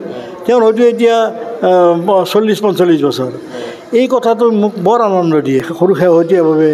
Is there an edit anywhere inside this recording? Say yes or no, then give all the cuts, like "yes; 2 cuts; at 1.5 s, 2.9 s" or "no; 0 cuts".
yes; 1 cut; at 5.7 s